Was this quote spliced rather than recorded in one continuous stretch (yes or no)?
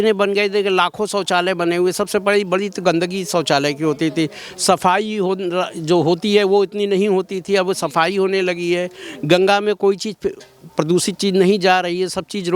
no